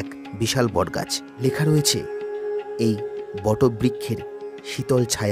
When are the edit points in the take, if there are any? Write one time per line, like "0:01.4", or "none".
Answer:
0:01.2